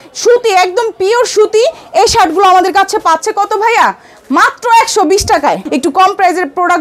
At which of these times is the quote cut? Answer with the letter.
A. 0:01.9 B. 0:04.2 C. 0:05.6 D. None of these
C